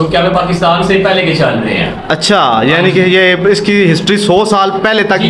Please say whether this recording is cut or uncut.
uncut